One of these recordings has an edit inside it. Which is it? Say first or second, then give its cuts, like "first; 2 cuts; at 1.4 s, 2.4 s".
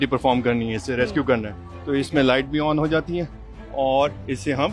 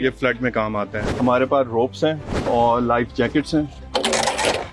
second; 3 cuts; at 1.0 s, 2.4 s, 3.8 s